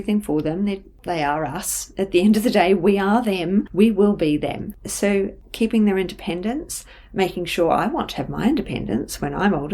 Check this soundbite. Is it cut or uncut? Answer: cut